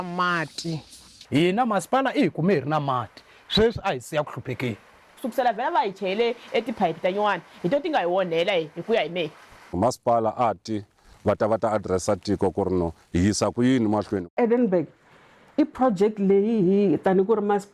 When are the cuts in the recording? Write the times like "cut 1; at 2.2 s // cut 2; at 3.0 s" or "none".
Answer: cut 1; at 1.1 s // cut 2; at 5.2 s // cut 3; at 9.7 s // cut 4; at 11.0 s // cut 5; at 14.3 s